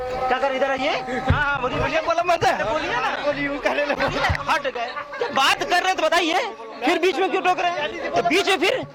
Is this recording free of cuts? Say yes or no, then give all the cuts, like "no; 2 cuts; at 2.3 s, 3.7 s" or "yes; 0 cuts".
yes; 0 cuts